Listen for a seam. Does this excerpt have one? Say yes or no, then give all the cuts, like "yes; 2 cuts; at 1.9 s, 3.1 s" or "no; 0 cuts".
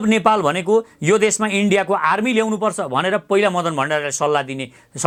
no; 0 cuts